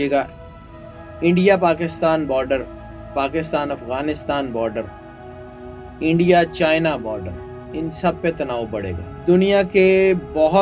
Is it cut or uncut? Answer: cut